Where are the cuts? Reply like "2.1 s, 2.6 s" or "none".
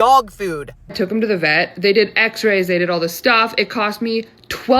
0.9 s